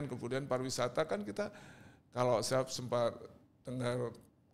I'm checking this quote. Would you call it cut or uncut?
uncut